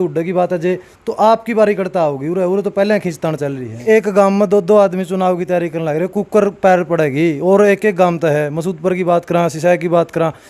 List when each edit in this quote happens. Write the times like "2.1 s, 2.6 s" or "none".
3.7 s